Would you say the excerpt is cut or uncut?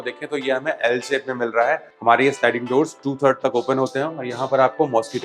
cut